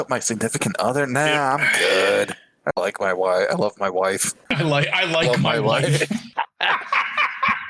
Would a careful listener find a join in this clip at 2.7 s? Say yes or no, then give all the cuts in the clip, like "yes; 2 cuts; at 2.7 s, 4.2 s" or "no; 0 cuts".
no; 2 cuts; at 4.5 s, 6.3 s